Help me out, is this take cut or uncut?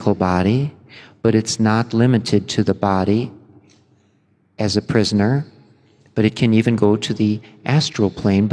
uncut